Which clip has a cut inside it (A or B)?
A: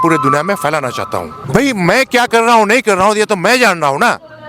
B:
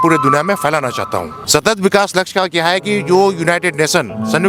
A